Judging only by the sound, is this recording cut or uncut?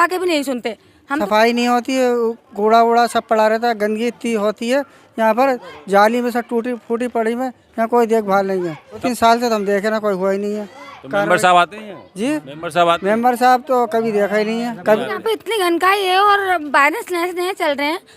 cut